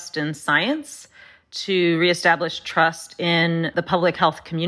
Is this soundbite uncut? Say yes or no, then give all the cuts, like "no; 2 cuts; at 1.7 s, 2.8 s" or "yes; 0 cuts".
no; 1 cut; at 3.7 s